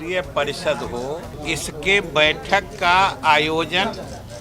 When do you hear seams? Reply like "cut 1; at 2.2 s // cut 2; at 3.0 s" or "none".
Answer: cut 1; at 1.3 s